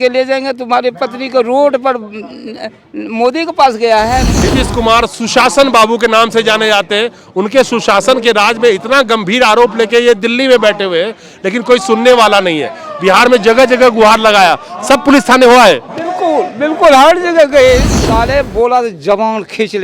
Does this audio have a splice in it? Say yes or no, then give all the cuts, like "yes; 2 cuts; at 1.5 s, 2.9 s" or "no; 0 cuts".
yes; 2 cuts; at 4.3 s, 18.0 s